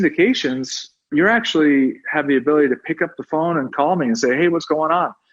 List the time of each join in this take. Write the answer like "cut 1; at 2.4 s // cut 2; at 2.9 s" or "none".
cut 1; at 3.7 s